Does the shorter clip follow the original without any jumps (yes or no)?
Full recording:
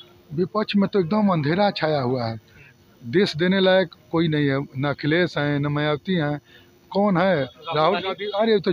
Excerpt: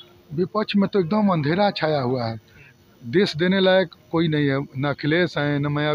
yes